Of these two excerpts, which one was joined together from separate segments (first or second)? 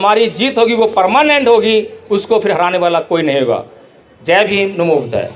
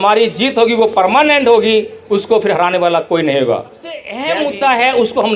second